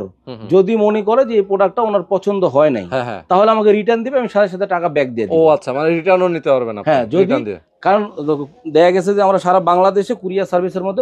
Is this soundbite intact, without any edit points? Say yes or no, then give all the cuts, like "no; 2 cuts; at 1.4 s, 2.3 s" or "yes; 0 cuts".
yes; 0 cuts